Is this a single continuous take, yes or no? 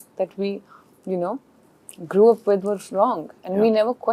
yes